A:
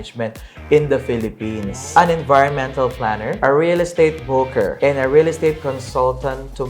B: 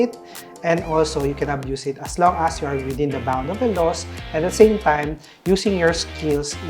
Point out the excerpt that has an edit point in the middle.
A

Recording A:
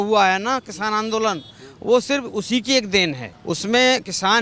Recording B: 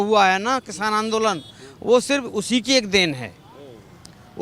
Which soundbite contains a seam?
A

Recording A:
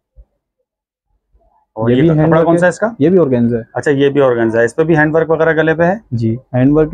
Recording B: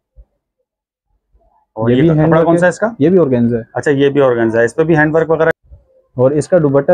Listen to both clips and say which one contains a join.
B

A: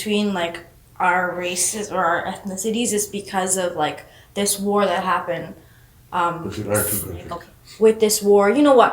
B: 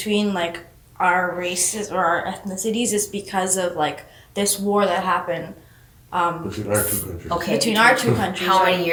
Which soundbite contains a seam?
A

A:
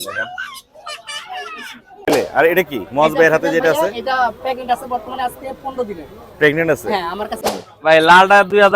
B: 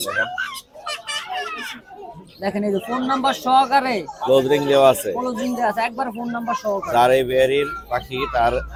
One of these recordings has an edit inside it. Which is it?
A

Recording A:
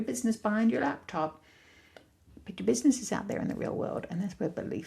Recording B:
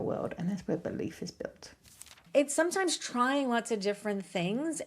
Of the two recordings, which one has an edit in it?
B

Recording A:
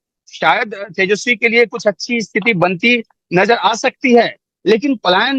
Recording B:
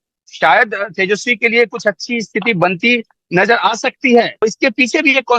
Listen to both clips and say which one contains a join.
B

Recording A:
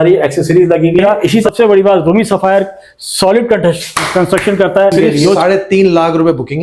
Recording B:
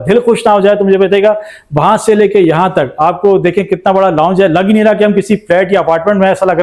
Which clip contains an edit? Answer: A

